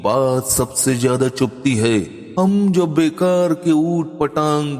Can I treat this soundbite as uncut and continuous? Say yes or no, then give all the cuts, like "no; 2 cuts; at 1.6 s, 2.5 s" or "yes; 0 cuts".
no; 1 cut; at 2.2 s